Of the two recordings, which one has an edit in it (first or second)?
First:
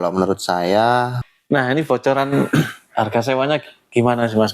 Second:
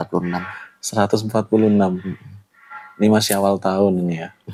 first